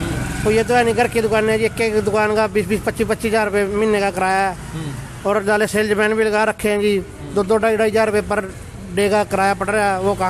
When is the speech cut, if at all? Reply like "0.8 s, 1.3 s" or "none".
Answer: none